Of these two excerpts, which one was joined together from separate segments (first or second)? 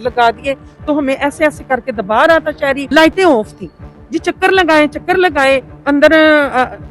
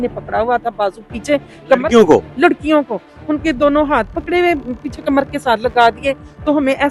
first